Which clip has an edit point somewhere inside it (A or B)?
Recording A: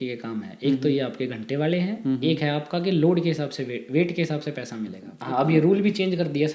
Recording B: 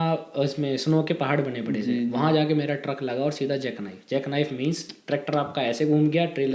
A